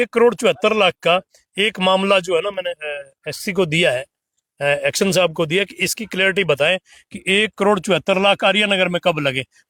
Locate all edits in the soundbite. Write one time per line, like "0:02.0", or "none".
none